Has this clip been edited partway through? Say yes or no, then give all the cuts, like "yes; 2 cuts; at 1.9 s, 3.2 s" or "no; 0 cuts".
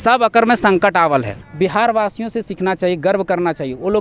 yes; 1 cut; at 1.4 s